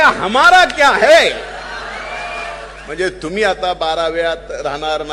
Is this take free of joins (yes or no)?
no